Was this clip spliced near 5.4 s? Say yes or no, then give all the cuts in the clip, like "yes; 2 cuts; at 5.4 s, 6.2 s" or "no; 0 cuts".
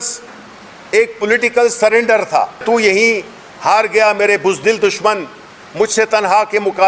no; 1 cut; at 2.6 s